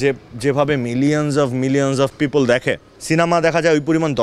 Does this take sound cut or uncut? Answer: cut